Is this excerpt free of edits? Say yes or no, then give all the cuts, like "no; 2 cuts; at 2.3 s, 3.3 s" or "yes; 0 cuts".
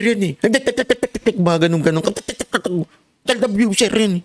yes; 0 cuts